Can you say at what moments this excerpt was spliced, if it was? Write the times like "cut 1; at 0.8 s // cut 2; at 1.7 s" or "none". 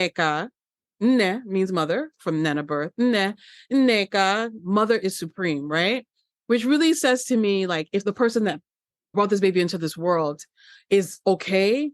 cut 1; at 8.0 s // cut 2; at 9.1 s